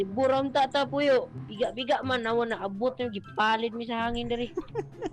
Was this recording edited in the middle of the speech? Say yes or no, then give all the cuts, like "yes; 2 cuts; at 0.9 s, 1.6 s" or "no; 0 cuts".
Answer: yes; 1 cut; at 1.4 s